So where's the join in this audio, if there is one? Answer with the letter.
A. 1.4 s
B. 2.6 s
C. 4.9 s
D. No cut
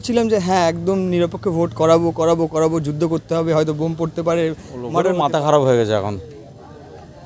C